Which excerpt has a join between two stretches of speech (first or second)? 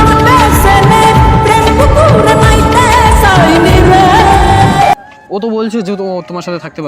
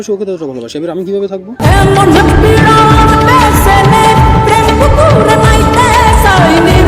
first